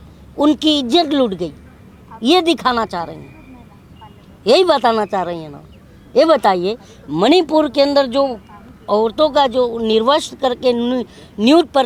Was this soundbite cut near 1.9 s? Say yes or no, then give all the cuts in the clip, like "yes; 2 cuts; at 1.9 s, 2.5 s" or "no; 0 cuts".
no; 0 cuts